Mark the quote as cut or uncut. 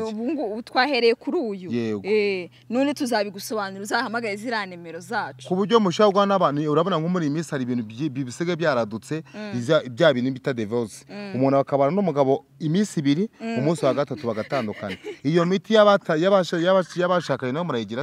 uncut